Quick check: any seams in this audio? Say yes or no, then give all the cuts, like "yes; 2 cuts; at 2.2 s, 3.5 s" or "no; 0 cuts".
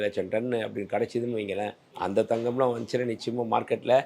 yes; 1 cut; at 1.8 s